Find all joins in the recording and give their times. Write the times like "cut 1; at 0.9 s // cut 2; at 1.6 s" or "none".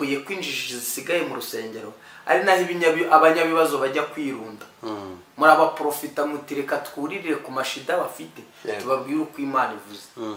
none